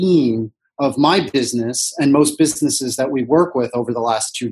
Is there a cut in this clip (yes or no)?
no